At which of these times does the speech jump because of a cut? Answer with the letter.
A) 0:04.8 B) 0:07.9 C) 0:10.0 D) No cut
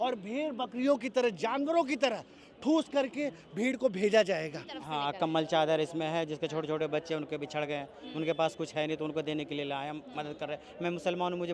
A